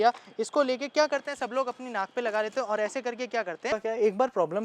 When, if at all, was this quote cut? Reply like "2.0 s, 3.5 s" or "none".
3.7 s